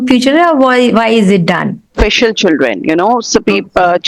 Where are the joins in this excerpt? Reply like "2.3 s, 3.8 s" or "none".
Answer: 1.9 s